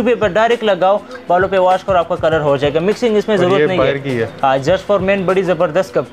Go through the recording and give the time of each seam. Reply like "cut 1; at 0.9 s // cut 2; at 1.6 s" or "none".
none